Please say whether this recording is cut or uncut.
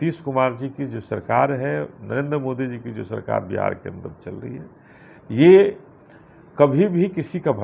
uncut